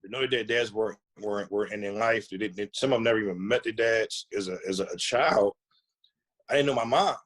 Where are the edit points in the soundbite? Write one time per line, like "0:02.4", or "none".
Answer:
0:04.2